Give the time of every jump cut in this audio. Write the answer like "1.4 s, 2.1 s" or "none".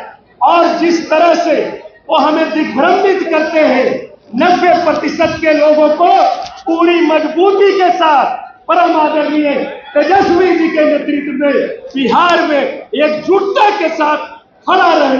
none